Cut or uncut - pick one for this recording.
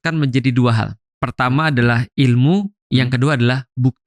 uncut